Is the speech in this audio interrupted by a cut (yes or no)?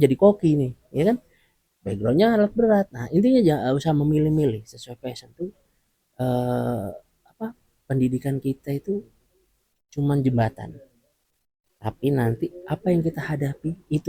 no